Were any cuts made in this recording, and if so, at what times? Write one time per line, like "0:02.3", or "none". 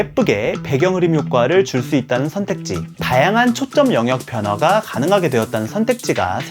0:02.9